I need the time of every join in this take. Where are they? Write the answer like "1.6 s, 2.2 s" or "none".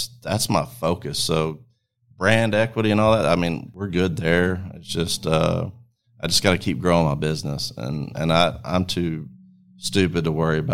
3.7 s